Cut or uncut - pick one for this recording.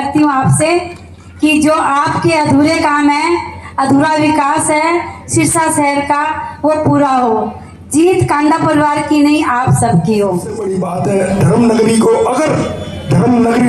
cut